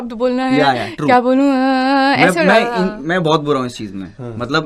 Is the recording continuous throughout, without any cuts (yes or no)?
yes